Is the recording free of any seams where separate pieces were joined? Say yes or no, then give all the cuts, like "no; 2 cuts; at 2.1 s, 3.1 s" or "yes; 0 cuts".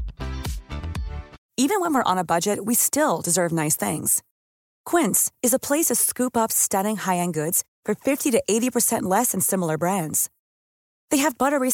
no; 1 cut; at 1.4 s